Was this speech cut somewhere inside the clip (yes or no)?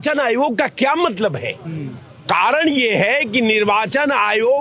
no